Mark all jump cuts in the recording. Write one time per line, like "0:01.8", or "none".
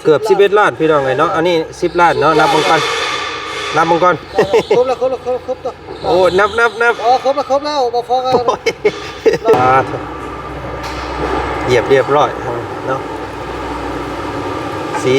0:09.5